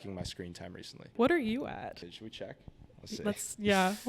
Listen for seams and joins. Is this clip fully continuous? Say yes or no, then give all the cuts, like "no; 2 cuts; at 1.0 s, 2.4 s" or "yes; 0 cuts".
no; 2 cuts; at 1.1 s, 2.0 s